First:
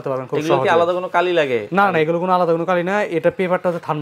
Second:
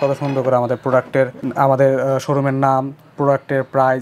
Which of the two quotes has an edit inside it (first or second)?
second